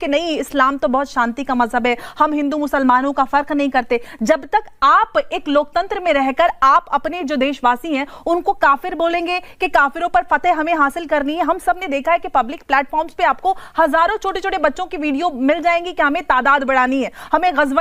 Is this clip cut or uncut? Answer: uncut